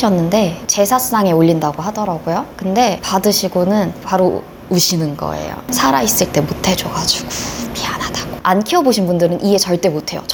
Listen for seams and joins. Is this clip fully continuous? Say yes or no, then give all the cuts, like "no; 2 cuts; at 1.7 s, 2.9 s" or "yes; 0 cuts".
yes; 0 cuts